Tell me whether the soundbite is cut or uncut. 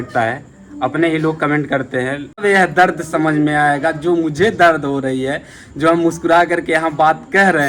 cut